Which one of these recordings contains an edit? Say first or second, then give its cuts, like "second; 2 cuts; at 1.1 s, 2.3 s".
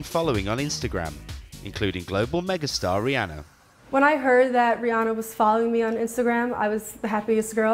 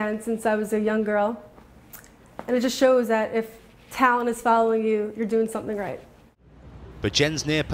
second; 1 cut; at 6.6 s